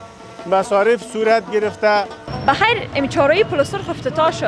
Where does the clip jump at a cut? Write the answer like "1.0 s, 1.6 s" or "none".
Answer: 2.2 s